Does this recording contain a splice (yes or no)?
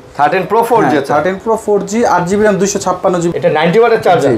yes